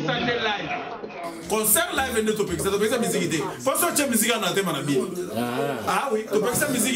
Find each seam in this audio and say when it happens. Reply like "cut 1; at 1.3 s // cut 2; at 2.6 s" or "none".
none

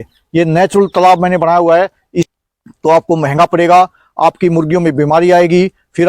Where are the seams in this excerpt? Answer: cut 1; at 2.3 s

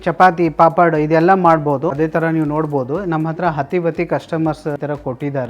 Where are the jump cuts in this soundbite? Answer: cut 1; at 2.0 s // cut 2; at 4.8 s

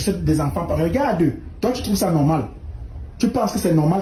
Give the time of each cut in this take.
none

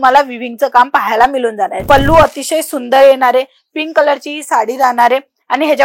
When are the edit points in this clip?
cut 1; at 1.8 s

